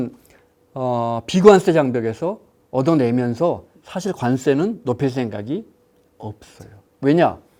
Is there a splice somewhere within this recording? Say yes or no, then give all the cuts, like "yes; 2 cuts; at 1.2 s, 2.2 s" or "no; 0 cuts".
no; 0 cuts